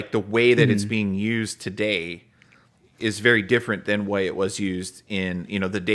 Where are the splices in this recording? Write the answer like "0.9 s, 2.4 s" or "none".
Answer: none